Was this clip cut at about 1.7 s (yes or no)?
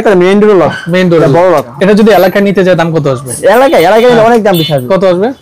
yes